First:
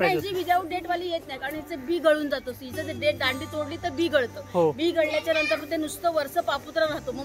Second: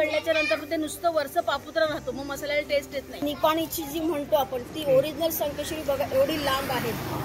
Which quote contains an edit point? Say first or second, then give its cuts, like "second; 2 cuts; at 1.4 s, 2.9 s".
second; 1 cut; at 3.2 s